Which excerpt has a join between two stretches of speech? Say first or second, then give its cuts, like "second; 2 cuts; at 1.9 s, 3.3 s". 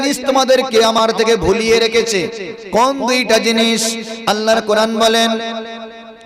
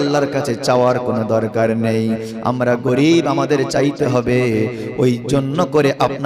first; 1 cut; at 1.0 s